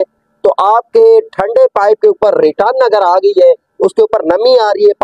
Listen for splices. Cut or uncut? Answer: uncut